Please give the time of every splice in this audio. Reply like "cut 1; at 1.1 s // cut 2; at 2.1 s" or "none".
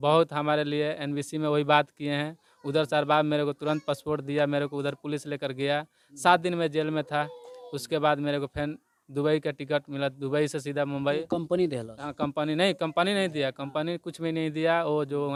none